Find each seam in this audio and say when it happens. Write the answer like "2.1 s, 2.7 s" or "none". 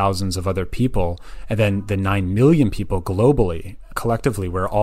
3.9 s